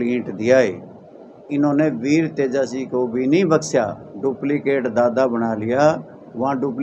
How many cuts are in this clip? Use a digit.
1